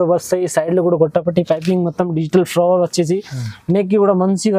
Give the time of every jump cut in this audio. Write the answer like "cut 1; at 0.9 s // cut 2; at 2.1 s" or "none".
none